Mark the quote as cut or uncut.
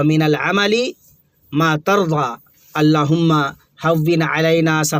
uncut